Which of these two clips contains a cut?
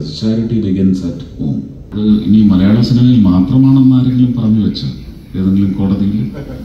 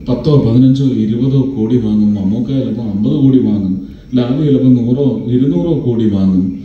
first; 1 cut; at 1.8 s

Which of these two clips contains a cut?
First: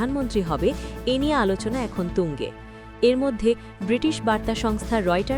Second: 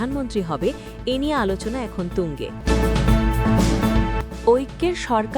second; 2 cuts; at 2.5 s, 4.5 s

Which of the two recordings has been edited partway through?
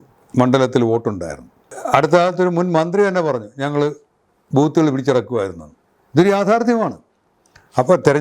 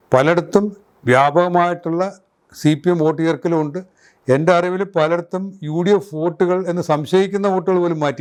first; 1 cut; at 1.7 s

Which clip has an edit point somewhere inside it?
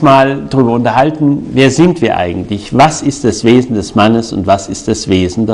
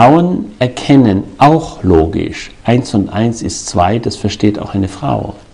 second; 1 cut; at 2.9 s

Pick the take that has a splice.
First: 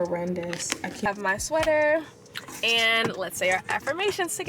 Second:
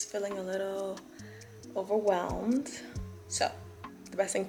first; 1 cut; at 1.0 s

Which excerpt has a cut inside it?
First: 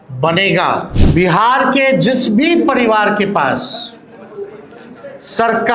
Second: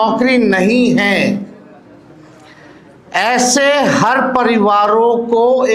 first; 1 cut; at 1.0 s

